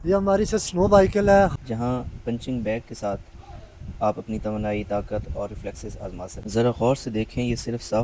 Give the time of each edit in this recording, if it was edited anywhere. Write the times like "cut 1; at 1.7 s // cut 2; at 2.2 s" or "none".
cut 1; at 1.6 s // cut 2; at 6.4 s